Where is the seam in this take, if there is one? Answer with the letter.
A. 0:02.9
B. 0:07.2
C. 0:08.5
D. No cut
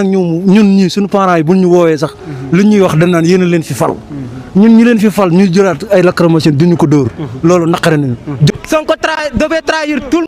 C